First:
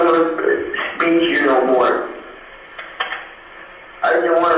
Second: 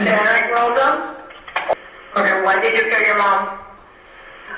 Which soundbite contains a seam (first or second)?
second